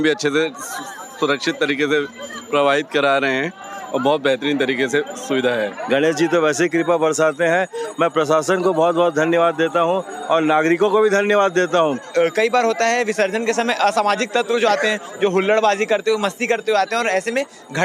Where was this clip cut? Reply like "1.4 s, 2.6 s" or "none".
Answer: 5.8 s, 12.1 s